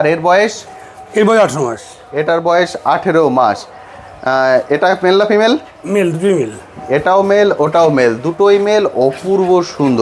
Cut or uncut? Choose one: uncut